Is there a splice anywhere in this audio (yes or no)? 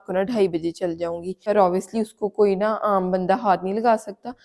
yes